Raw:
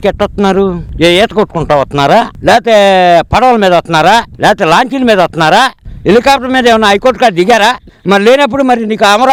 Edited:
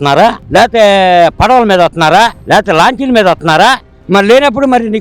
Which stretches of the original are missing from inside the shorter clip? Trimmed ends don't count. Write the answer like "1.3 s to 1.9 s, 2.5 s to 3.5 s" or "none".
5.9 s to 7.9 s